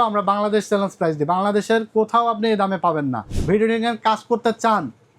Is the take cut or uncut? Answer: cut